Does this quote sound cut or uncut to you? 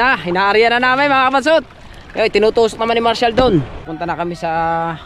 cut